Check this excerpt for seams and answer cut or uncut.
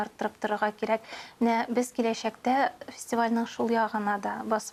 uncut